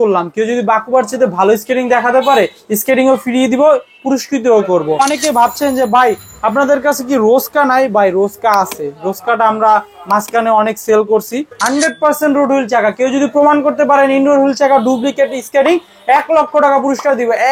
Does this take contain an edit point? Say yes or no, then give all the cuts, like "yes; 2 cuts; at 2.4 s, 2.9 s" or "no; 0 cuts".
yes; 2 cuts; at 5.0 s, 11.5 s